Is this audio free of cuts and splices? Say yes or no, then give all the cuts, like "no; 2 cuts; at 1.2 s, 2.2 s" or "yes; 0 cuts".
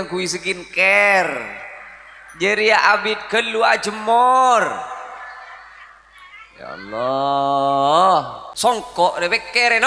no; 1 cut; at 8.4 s